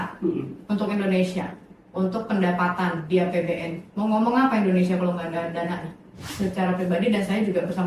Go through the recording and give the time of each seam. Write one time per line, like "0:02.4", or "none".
0:06.3